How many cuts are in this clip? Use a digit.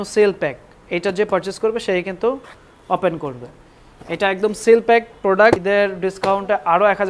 1